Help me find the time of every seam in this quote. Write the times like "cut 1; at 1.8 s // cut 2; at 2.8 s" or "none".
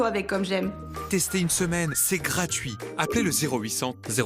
cut 1; at 1.0 s